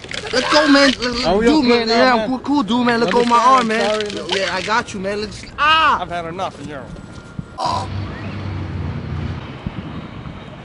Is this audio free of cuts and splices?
no; 1 cut; at 9.4 s

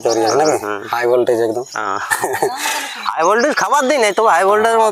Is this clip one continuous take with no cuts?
yes; 0 cuts

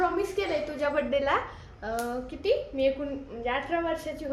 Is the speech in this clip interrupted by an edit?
no; 0 cuts

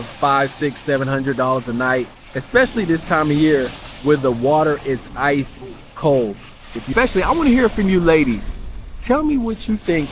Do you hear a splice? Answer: yes; 1 cut; at 6.9 s

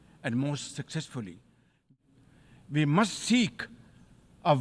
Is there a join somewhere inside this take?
yes; 1 cut; at 1.9 s

